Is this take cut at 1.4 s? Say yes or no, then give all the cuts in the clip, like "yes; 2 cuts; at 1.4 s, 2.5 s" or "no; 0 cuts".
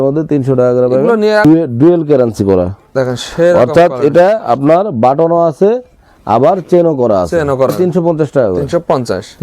yes; 2 cuts; at 1.4 s, 7.7 s